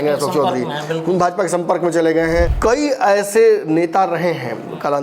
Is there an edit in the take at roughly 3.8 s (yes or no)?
no